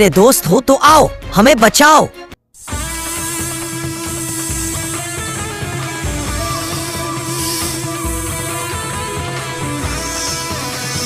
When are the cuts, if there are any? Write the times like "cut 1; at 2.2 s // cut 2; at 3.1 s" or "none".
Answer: none